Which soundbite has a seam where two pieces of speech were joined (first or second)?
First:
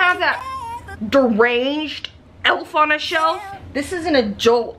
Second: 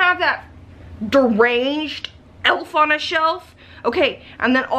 first